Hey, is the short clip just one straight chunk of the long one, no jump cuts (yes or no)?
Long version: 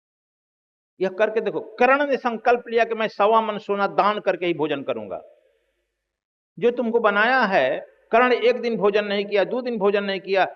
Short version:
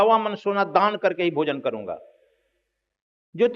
yes